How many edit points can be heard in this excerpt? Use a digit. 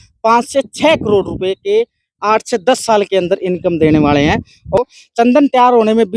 1